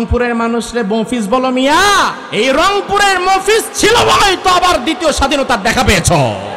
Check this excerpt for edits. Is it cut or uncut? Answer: cut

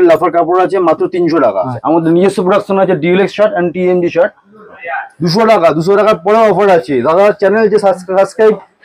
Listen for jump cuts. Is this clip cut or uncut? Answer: cut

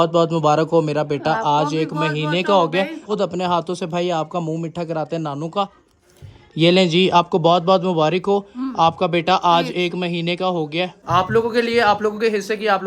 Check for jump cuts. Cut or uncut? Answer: cut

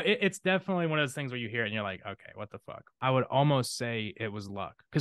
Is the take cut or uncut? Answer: cut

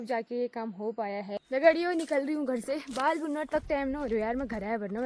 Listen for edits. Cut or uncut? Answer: cut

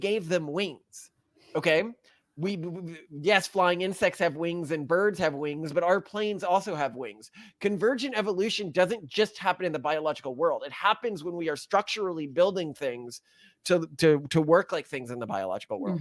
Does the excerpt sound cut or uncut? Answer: uncut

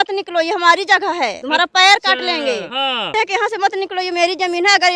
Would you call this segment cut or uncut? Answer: cut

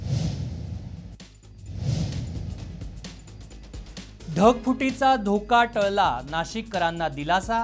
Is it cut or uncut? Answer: cut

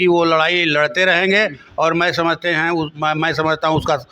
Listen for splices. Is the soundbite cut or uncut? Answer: uncut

